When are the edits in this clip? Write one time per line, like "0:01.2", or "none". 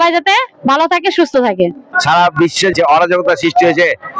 0:01.8